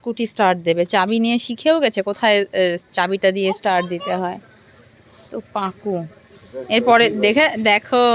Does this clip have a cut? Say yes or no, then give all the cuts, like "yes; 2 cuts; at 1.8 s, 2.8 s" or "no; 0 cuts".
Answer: no; 0 cuts